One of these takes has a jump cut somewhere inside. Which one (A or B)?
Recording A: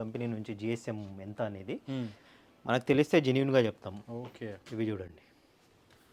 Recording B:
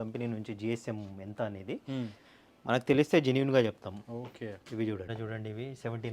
B